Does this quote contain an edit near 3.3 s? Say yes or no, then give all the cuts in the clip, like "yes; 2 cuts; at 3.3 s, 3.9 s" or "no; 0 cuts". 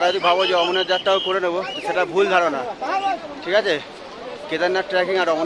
no; 0 cuts